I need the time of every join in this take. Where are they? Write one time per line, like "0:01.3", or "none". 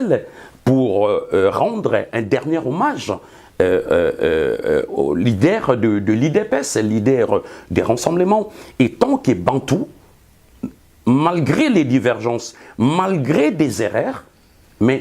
none